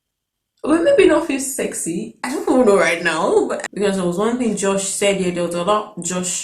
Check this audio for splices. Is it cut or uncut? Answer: cut